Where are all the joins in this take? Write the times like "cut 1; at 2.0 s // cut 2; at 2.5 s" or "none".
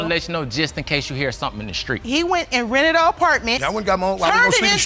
cut 1; at 2.0 s